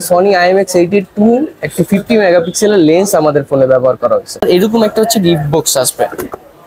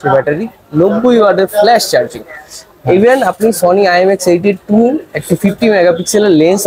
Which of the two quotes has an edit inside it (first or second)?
first